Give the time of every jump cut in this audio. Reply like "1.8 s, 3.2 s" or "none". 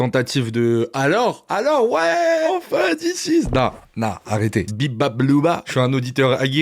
2.5 s, 4.7 s, 5.6 s